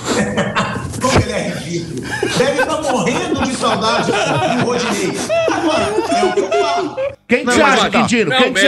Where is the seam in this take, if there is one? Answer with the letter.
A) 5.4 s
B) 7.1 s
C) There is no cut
B